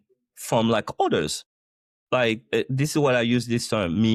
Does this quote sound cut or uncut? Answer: uncut